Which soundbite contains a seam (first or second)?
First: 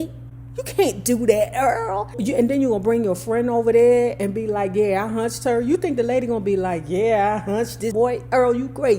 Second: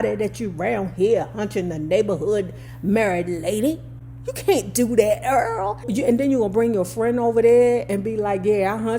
first